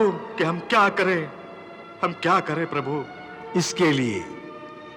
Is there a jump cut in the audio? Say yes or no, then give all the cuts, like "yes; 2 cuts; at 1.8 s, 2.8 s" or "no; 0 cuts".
no; 0 cuts